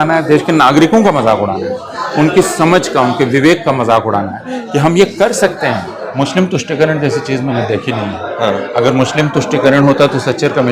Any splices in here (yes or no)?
yes